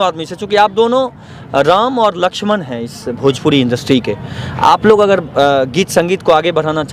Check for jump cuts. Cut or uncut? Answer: uncut